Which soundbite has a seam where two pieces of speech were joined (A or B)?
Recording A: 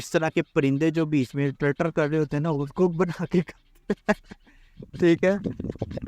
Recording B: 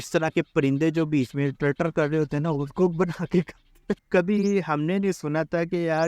B